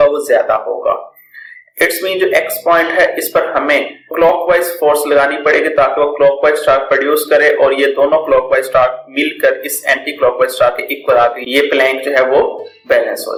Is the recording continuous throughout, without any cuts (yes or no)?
yes